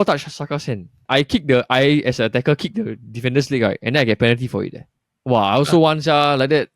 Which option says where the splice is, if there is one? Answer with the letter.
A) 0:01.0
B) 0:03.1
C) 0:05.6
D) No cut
A